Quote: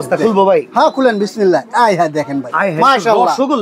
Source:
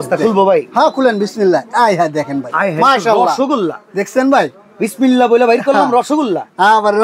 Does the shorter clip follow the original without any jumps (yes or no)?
yes